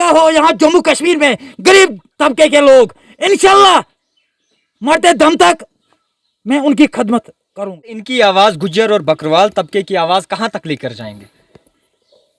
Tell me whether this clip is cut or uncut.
cut